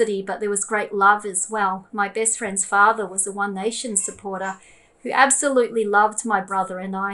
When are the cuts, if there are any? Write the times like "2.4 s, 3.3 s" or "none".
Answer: none